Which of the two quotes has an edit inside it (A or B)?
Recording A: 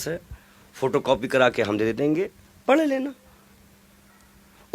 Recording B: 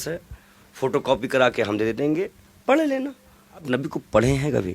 B